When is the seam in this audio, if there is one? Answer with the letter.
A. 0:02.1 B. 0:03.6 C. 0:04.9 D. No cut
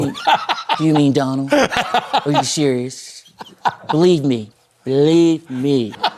D